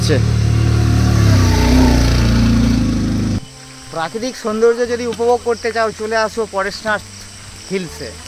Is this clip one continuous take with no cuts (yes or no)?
no